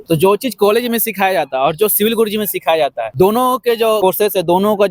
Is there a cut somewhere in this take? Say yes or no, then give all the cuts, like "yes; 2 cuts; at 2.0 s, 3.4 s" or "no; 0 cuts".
yes; 2 cuts; at 3.0 s, 4.0 s